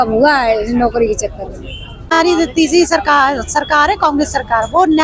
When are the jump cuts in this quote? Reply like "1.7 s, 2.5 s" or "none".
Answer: 2.2 s